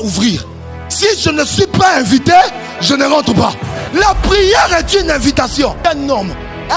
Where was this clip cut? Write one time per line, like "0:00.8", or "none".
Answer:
0:03.7
0:05.8